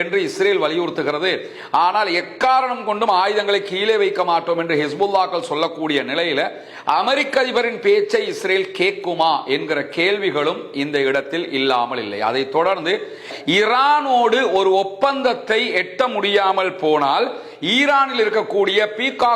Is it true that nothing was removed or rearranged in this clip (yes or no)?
no